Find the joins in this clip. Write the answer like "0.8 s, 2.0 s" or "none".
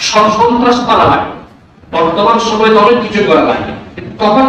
none